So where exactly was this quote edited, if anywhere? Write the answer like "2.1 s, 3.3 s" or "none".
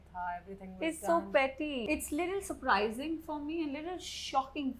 1.8 s